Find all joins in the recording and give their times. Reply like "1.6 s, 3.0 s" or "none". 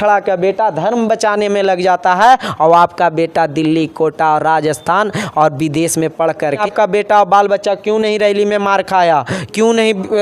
6.5 s

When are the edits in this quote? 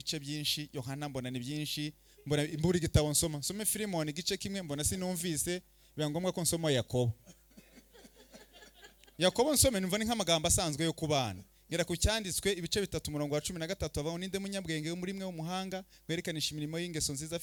none

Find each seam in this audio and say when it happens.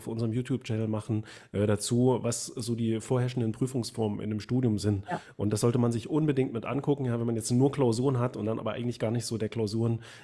none

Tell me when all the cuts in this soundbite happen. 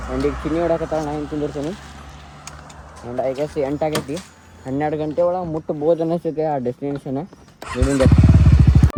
none

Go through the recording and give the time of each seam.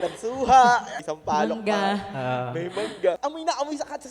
1.0 s, 3.2 s

